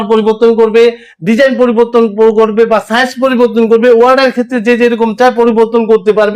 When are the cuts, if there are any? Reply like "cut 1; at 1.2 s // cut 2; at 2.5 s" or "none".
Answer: none